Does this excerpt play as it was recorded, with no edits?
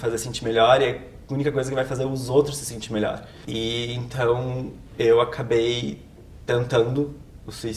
no; 1 cut; at 3.3 s

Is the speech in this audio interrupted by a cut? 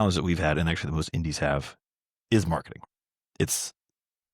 yes; 1 cut; at 2.8 s

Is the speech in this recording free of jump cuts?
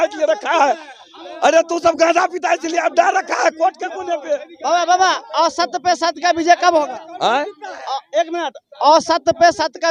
yes; 0 cuts

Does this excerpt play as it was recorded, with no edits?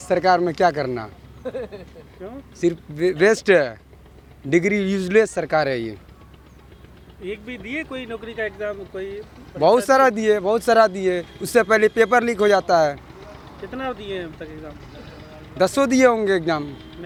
yes; 0 cuts

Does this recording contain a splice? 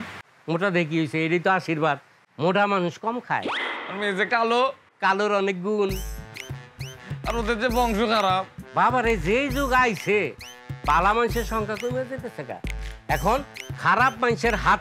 no; 0 cuts

